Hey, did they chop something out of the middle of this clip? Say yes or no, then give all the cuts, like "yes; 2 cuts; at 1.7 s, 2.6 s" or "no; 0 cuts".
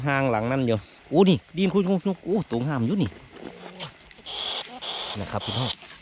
yes; 1 cut; at 0.9 s